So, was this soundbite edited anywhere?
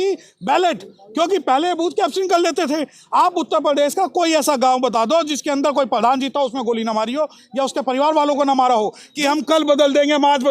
yes; 1 cut; at 9.1 s

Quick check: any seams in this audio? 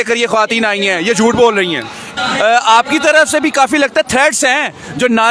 yes; 1 cut; at 2.1 s

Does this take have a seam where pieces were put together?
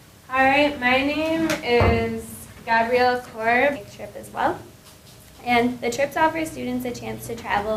no; 0 cuts

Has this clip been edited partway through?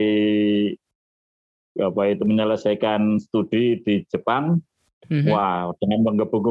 no; 0 cuts

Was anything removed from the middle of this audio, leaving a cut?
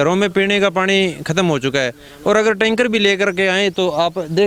no; 0 cuts

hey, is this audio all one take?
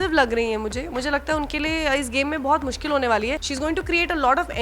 no; 1 cut; at 3.5 s

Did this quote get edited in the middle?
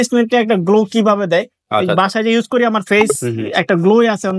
no; 0 cuts

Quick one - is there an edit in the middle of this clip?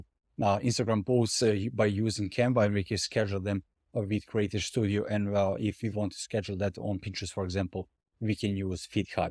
no; 0 cuts

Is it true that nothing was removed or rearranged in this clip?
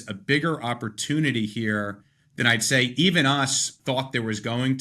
no; 1 cut; at 3.8 s

